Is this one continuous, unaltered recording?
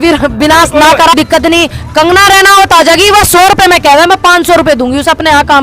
no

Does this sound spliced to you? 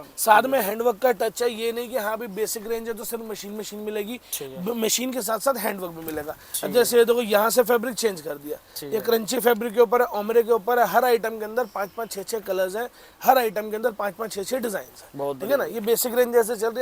no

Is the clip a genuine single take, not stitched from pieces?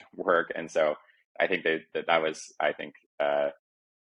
yes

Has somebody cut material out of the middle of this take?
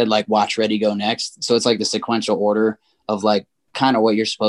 no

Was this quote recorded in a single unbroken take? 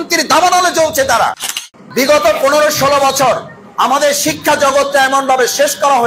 no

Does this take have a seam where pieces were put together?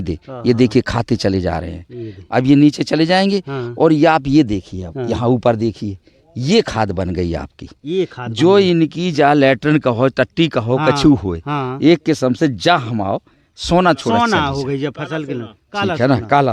no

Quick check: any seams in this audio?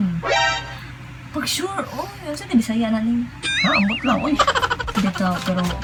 no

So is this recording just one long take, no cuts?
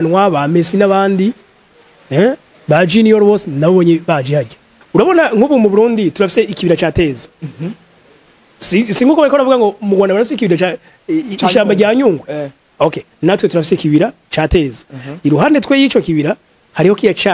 no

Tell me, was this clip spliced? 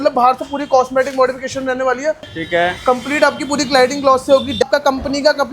yes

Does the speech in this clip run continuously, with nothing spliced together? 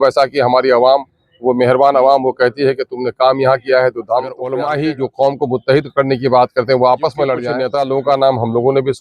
no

